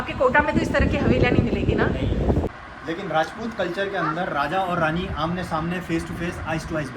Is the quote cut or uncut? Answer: cut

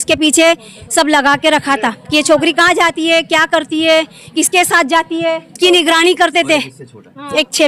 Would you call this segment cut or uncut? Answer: cut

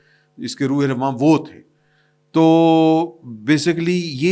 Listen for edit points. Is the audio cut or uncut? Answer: uncut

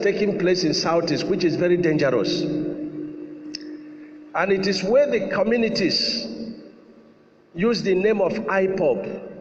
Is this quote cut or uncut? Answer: uncut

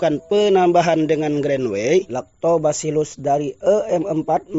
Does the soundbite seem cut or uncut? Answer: cut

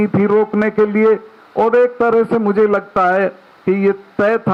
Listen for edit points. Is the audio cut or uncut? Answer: uncut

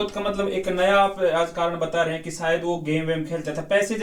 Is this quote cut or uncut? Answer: uncut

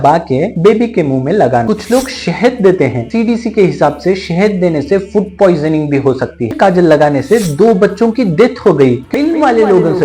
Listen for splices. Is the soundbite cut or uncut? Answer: cut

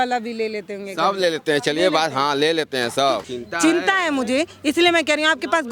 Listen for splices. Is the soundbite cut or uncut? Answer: cut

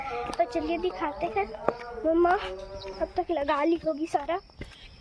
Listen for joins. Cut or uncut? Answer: uncut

